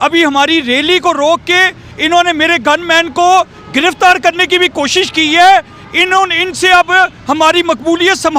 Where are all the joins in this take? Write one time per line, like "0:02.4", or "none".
none